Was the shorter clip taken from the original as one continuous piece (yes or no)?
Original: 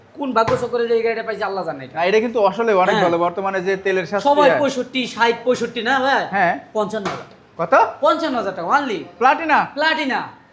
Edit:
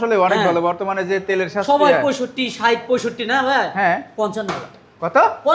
yes